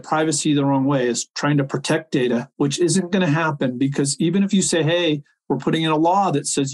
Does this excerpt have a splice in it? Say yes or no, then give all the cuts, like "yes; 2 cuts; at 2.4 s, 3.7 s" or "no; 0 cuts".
no; 0 cuts